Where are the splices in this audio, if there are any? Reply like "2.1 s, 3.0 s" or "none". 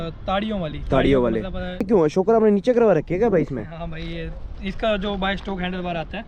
1.8 s